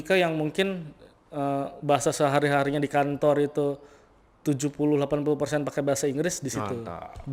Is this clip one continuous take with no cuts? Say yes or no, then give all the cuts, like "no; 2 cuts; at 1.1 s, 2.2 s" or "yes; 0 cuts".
yes; 0 cuts